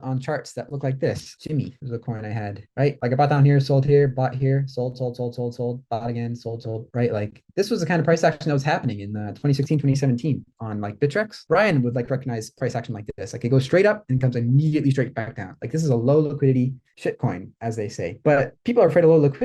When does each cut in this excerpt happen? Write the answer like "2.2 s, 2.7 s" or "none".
1.3 s, 6.8 s